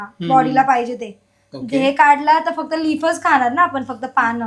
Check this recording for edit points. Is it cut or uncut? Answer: uncut